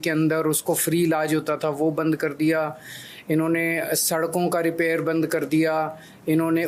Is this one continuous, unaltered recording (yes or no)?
yes